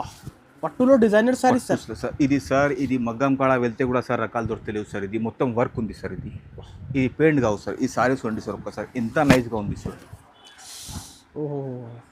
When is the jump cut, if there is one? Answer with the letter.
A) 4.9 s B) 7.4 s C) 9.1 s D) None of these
D